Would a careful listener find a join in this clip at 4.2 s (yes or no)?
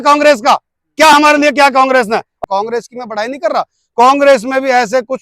no